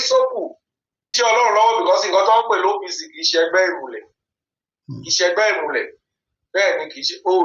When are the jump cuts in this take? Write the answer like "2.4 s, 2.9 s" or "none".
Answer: 1.1 s